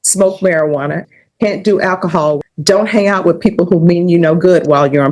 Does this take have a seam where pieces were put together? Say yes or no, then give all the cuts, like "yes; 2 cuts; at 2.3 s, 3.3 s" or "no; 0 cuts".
yes; 2 cuts; at 1.0 s, 2.4 s